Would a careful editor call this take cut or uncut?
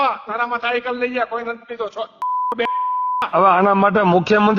cut